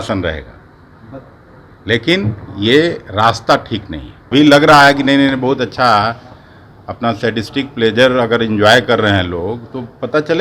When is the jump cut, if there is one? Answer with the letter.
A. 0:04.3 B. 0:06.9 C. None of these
A